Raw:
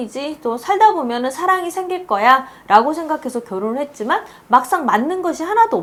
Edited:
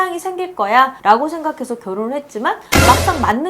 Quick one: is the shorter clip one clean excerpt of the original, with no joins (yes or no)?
no